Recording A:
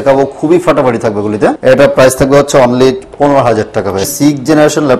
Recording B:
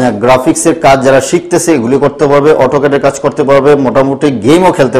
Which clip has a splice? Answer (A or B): A